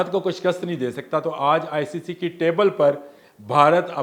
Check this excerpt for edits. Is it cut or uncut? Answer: uncut